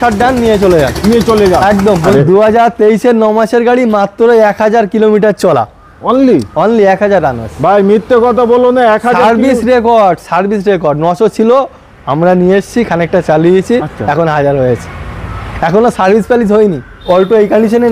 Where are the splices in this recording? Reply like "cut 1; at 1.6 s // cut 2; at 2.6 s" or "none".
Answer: cut 1; at 2.1 s // cut 2; at 16.9 s